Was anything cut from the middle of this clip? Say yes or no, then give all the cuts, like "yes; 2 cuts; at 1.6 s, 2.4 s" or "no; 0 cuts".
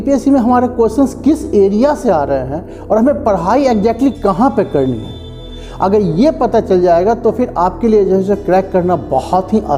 no; 0 cuts